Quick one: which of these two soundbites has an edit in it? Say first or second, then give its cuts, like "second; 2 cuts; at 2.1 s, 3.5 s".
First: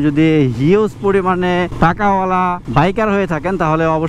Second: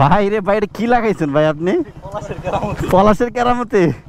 first; 2 cuts; at 1.7 s, 2.6 s